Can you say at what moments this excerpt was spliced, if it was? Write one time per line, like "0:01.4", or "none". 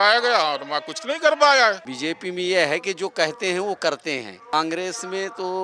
0:01.9
0:04.5